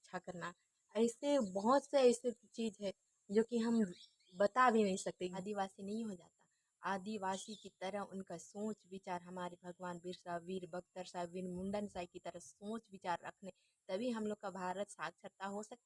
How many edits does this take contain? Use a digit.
1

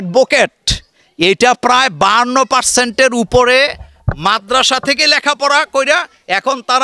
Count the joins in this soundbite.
0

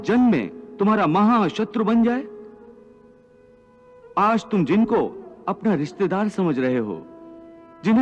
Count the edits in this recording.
0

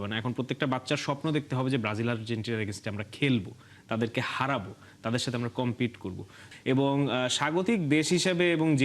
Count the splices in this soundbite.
1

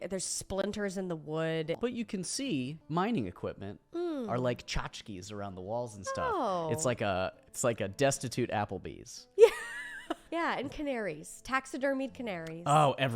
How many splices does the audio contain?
4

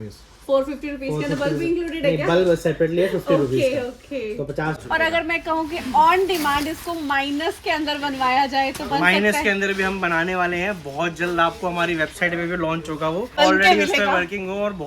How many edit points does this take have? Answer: 2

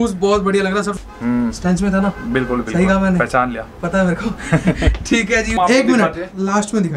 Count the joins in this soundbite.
2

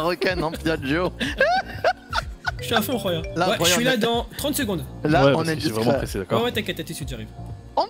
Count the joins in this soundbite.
2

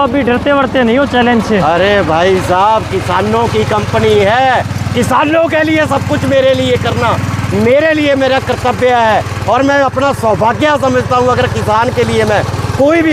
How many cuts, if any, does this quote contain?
0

